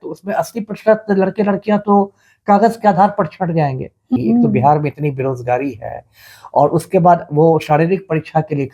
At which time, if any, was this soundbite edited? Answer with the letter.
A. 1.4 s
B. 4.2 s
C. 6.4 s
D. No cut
B